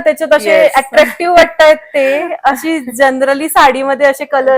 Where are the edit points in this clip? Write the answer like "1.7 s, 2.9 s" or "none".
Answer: none